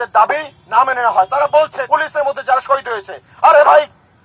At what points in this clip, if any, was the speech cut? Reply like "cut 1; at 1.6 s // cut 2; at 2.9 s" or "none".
cut 1; at 1.8 s